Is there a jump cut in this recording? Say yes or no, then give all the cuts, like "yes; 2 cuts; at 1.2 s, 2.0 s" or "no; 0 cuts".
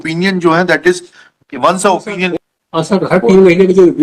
yes; 1 cut; at 2.3 s